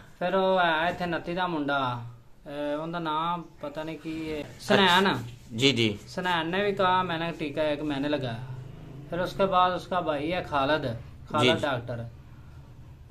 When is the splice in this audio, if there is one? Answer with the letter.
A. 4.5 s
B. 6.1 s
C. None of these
A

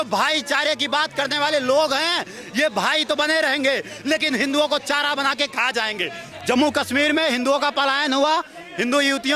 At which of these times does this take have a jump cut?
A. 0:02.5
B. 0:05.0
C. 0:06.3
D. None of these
C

